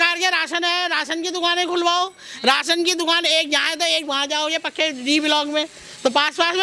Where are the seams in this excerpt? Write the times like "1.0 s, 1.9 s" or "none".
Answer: none